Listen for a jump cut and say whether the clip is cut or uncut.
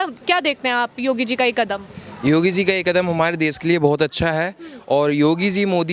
uncut